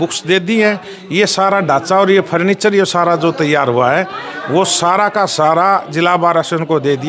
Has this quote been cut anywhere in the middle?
no; 0 cuts

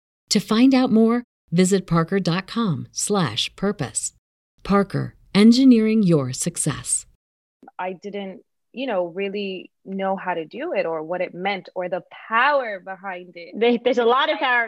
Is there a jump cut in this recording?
yes; 1 cut; at 7.7 s

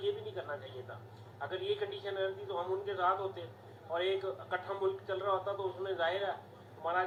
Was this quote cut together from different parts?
no; 0 cuts

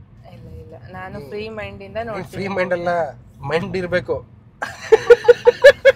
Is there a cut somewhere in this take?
no; 0 cuts

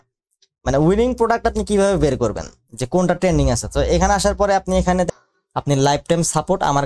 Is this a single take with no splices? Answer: no; 1 cut; at 5.1 s

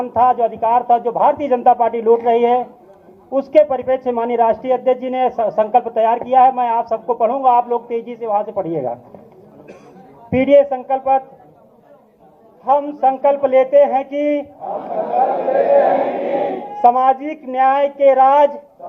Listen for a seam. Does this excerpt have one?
yes; 1 cut; at 5.4 s

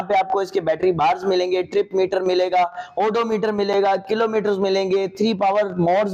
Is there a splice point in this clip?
no; 0 cuts

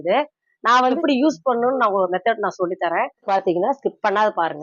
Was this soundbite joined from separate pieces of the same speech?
yes; 2 cuts; at 1.0 s, 3.3 s

